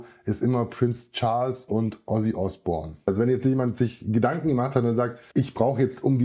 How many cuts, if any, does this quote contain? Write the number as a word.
two